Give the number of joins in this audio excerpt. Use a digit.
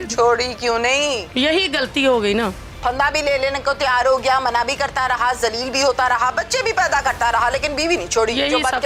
0